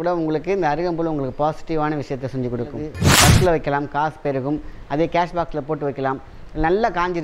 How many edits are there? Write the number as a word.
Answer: one